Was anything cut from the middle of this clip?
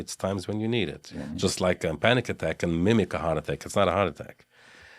yes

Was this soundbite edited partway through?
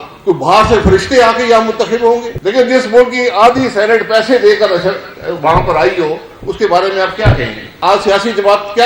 yes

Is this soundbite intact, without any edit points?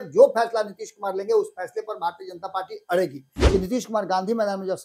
no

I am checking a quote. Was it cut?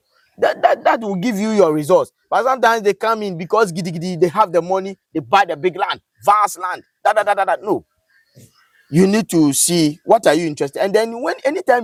no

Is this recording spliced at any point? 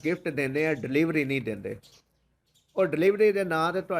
no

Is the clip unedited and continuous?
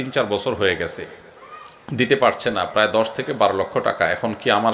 yes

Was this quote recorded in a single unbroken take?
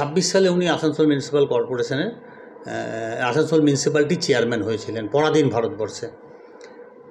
yes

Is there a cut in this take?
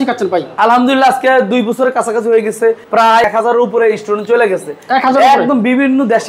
yes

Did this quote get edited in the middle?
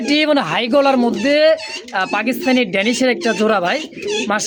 no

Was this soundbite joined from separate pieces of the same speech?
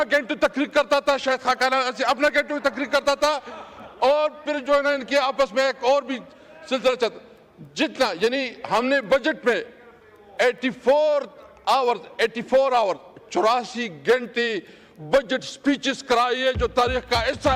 no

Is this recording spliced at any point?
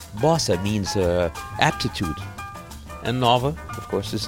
no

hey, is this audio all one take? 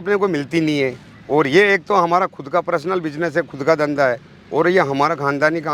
yes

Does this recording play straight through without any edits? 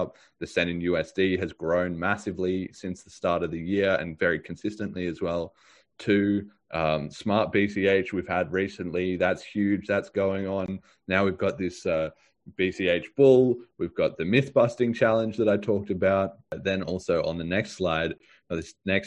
no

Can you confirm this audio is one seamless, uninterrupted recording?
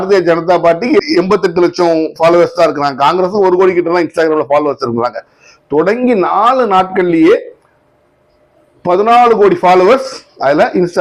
yes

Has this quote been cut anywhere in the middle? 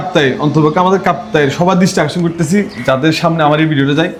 no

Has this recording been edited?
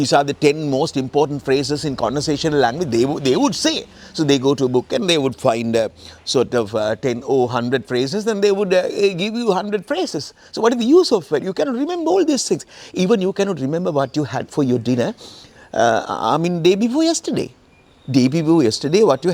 no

